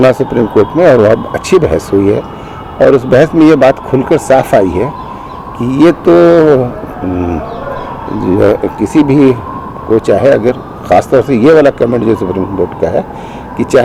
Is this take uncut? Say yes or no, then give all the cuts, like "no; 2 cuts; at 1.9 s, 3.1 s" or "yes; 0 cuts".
yes; 0 cuts